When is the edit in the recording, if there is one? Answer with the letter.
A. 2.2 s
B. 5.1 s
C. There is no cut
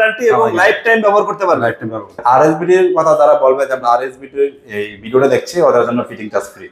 A